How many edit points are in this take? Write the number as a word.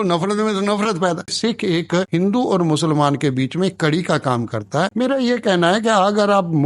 two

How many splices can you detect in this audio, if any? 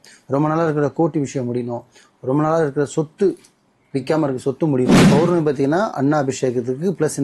one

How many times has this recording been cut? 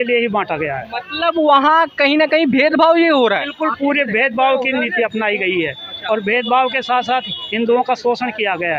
zero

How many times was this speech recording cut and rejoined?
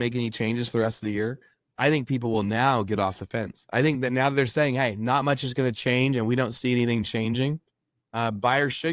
zero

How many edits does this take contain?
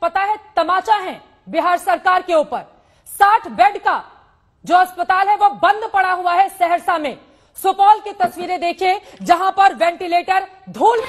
zero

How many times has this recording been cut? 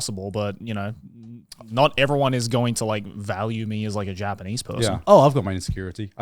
one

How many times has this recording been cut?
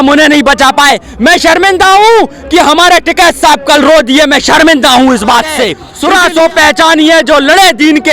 one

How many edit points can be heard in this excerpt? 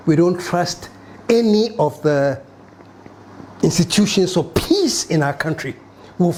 zero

